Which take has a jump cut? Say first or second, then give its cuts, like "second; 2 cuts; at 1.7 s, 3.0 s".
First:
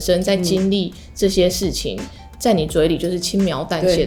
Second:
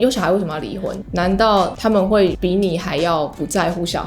second; 1 cut; at 0.9 s